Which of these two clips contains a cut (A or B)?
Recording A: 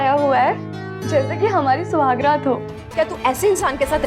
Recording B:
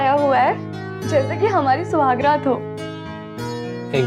A